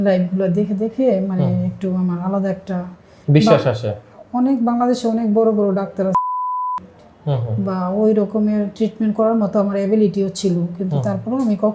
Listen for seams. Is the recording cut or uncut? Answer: uncut